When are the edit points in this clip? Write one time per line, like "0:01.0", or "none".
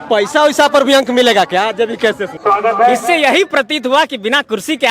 0:02.3